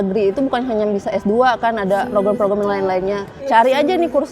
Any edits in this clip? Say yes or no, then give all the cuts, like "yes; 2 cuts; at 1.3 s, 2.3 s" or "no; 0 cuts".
yes; 2 cuts; at 2.1 s, 3.5 s